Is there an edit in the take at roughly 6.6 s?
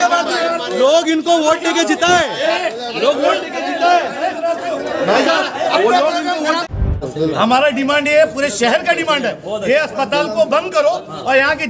yes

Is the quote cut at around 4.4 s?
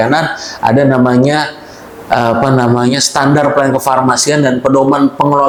no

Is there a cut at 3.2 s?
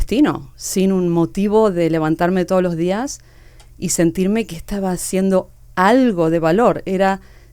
no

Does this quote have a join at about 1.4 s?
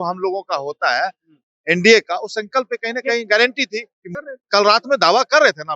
no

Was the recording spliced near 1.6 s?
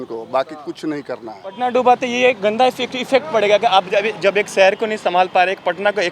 yes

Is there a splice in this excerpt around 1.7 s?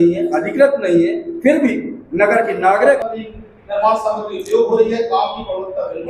no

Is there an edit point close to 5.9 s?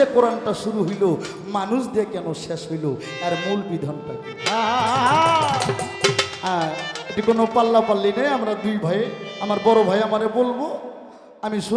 no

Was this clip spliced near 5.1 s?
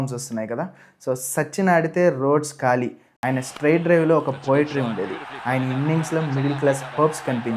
no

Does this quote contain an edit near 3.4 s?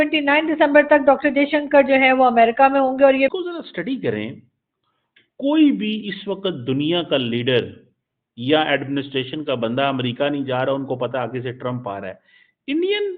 yes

